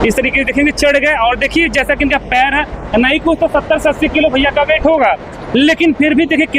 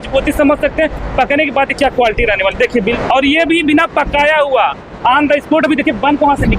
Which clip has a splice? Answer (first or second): second